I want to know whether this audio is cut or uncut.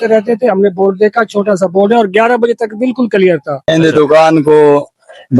cut